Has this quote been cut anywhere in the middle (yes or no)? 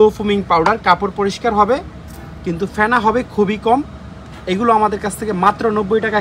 no